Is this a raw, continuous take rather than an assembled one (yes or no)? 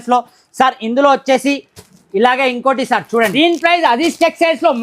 no